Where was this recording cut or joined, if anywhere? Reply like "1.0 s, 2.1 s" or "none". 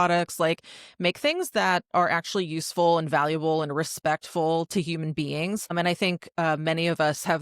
5.7 s